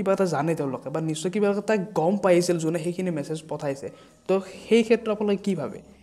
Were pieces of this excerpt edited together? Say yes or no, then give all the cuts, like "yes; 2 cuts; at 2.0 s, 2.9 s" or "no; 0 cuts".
no; 0 cuts